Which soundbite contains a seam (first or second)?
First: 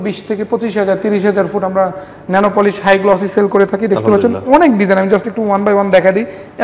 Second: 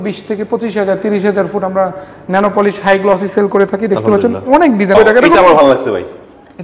second